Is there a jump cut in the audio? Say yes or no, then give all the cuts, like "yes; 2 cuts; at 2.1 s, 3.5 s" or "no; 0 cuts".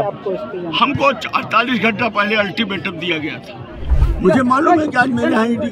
yes; 1 cut; at 4.0 s